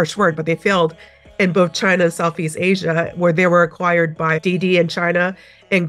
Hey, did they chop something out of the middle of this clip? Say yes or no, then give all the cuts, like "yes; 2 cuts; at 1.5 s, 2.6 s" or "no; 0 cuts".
no; 0 cuts